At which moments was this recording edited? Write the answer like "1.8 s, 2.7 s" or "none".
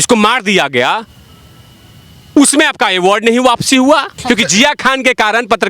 4.1 s